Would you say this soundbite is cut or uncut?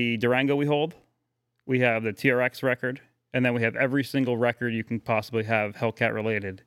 uncut